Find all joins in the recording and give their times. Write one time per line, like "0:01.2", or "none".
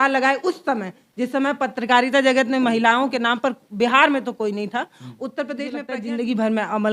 0:05.8